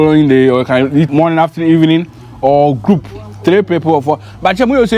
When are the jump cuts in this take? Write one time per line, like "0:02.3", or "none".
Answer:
0:01.1